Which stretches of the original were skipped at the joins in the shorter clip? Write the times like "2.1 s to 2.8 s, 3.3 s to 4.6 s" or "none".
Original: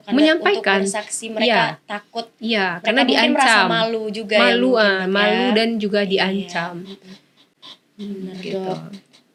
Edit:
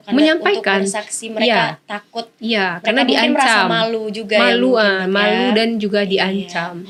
none